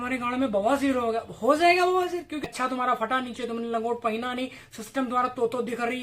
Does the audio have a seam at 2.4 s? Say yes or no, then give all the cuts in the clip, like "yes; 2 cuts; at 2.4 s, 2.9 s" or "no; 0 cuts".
yes; 1 cut; at 2.4 s